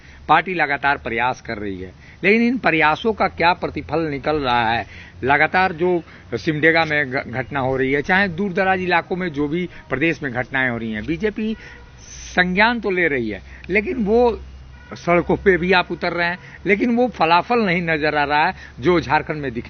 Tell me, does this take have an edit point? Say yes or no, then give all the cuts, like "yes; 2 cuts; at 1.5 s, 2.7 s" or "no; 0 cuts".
no; 0 cuts